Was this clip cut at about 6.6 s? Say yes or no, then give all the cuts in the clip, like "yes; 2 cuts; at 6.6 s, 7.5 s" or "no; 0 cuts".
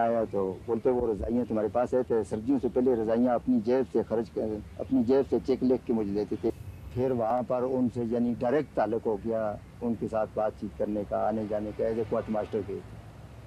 yes; 1 cut; at 6.6 s